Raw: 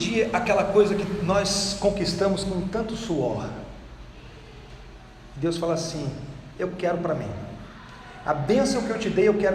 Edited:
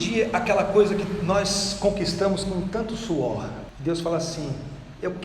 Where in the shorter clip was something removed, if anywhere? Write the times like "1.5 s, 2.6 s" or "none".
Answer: 3.7 s